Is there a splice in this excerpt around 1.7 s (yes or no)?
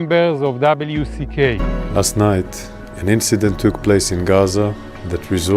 yes